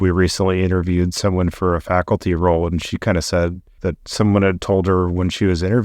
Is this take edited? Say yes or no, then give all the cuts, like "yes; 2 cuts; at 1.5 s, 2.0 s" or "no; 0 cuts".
yes; 1 cut; at 3.7 s